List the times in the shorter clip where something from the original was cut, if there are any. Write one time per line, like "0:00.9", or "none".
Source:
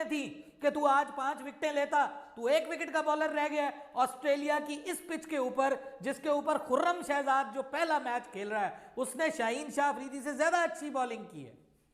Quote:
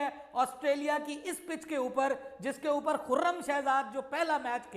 none